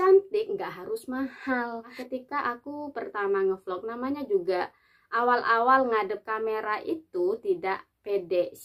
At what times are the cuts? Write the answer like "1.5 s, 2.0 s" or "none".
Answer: 2.0 s